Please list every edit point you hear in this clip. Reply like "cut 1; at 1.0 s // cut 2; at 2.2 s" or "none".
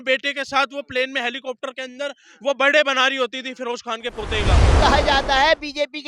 cut 1; at 4.7 s